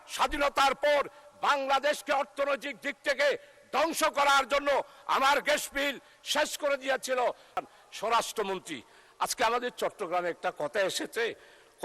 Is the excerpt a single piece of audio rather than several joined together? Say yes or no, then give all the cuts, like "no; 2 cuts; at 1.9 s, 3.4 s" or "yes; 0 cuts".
no; 1 cut; at 7.6 s